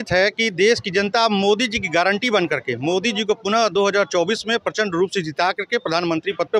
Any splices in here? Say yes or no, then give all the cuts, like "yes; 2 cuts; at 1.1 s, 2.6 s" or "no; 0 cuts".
no; 0 cuts